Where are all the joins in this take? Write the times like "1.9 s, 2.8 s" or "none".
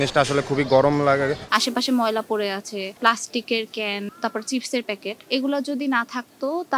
1.4 s, 3.0 s, 4.1 s, 5.1 s

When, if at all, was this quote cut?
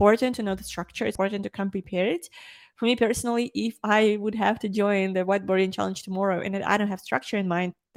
1.1 s

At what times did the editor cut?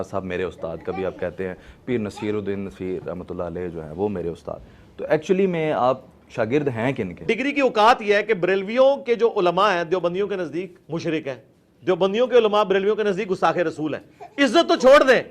7.2 s, 10.8 s

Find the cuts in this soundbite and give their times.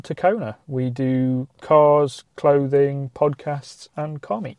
none

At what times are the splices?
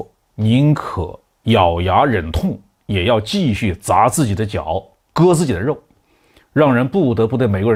none

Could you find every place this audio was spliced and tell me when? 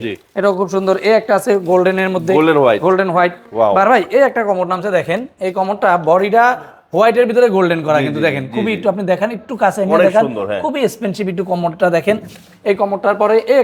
none

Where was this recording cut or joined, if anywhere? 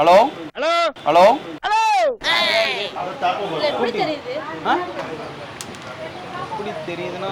2.9 s

